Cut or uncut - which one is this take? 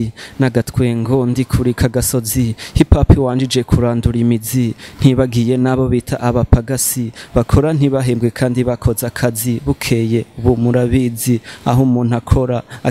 uncut